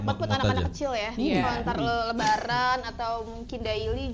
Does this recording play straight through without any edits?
yes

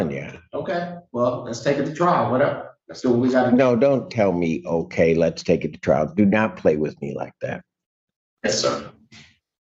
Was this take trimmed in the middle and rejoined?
no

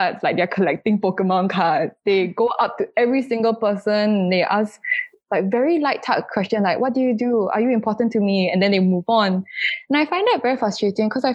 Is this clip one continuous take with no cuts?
yes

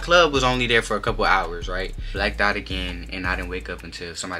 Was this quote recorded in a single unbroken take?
no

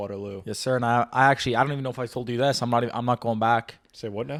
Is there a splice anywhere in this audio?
no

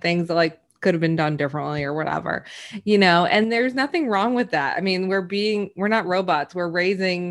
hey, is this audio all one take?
yes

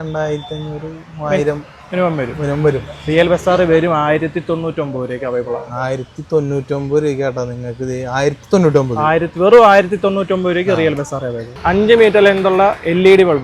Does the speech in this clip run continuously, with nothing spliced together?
no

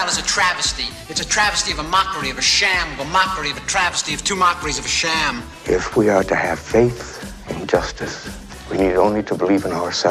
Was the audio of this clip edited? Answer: no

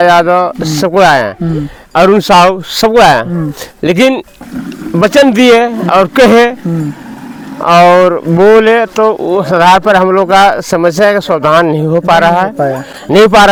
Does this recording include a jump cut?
no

